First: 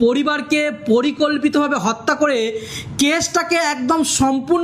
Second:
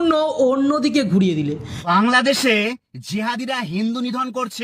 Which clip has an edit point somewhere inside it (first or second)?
second